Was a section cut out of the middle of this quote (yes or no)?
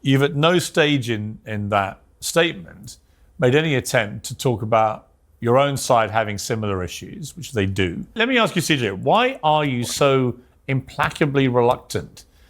yes